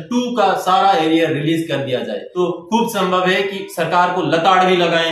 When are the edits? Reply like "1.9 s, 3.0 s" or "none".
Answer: 2.2 s